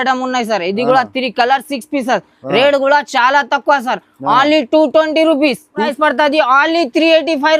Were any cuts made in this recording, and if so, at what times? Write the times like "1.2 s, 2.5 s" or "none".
5.9 s